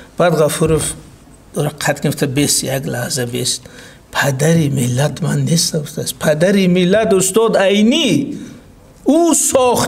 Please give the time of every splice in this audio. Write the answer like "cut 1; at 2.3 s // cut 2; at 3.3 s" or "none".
none